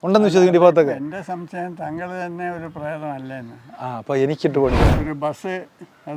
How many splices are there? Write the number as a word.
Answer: one